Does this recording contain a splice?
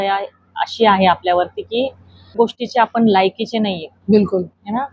yes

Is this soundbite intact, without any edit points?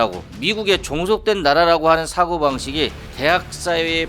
no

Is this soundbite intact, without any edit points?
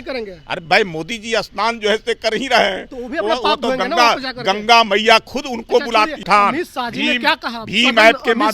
no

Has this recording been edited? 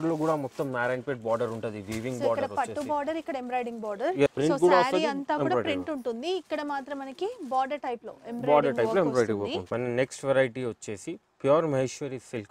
yes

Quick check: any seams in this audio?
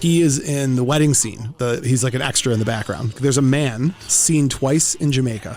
yes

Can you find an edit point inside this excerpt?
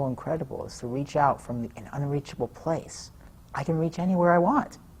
no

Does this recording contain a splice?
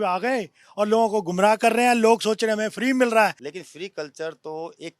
yes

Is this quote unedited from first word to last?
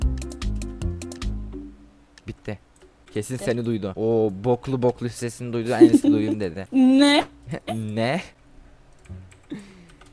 yes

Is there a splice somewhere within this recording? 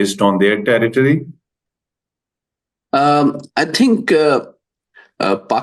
no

